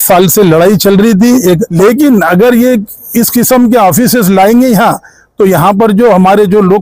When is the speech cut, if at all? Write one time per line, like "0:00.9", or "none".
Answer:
0:01.7